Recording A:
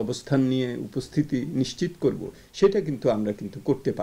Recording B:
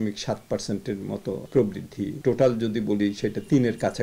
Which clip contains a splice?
B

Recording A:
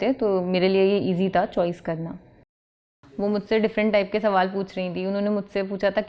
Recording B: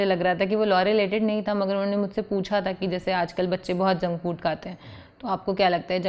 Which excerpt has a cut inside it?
A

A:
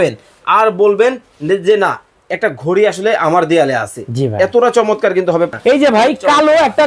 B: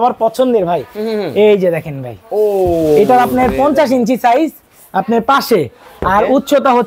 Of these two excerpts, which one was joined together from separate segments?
A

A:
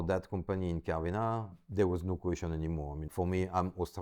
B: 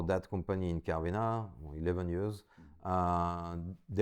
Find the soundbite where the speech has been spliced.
A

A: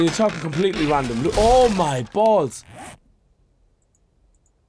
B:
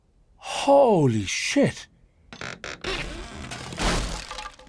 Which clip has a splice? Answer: B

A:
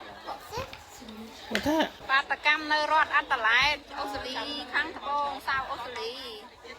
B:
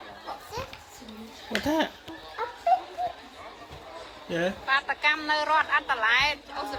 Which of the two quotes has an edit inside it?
A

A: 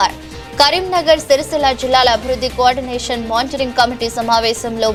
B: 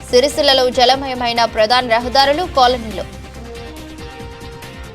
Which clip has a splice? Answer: B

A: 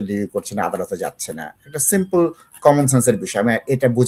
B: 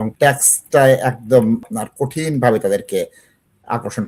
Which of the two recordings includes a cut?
B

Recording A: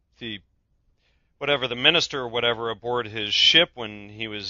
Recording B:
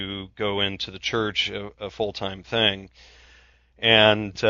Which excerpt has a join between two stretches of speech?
A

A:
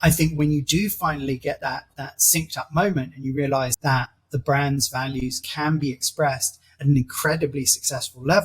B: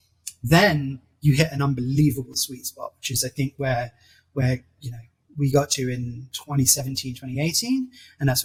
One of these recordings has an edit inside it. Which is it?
A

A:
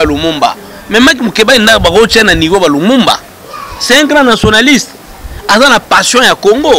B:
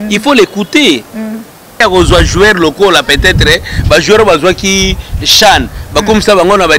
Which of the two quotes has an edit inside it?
B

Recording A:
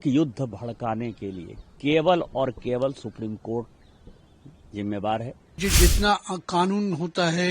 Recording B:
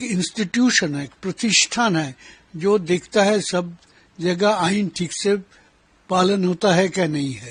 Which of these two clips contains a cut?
A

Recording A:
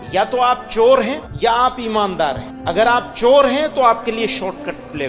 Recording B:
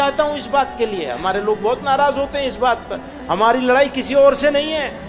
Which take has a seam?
A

